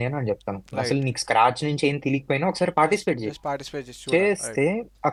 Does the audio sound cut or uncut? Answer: uncut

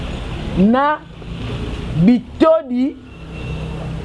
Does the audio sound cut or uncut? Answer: uncut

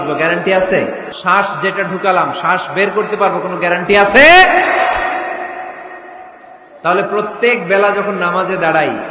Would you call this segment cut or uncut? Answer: cut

